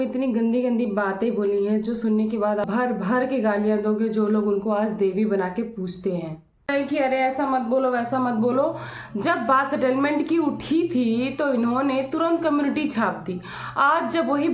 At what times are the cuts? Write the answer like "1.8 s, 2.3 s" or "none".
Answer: 2.6 s, 6.7 s